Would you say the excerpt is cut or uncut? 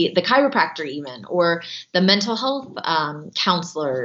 uncut